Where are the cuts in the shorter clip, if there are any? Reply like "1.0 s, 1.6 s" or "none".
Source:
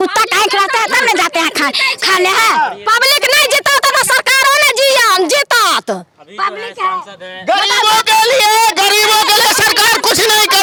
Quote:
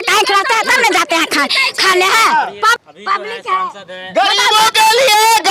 2.7 s